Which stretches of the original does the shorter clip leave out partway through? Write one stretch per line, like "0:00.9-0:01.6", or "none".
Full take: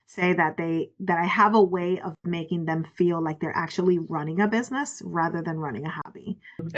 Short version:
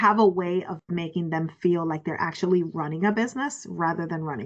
none